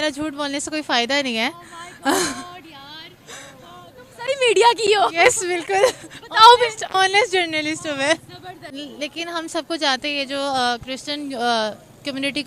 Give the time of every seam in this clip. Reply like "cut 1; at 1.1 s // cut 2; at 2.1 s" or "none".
none